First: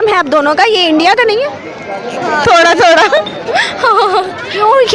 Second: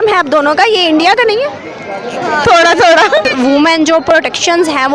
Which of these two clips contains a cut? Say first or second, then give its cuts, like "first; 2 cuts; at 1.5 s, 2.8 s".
second; 1 cut; at 3.3 s